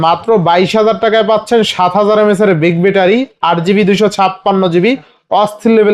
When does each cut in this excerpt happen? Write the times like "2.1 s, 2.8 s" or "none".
none